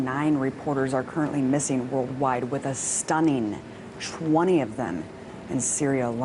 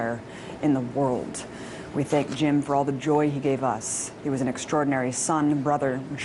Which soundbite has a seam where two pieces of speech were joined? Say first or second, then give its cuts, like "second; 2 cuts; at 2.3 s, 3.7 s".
first; 1 cut; at 5.1 s